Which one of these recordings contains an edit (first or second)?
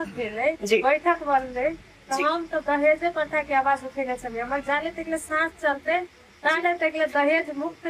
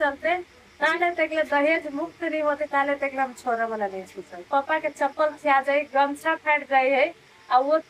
second